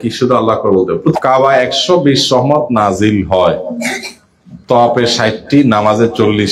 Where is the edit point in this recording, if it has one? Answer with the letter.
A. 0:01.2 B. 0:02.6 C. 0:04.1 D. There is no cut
A